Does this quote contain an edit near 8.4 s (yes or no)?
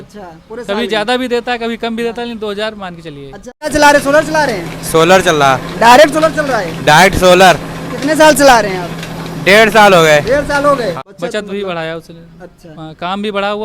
no